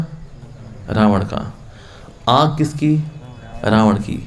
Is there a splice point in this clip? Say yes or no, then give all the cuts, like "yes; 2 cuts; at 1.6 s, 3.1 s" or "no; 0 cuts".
no; 0 cuts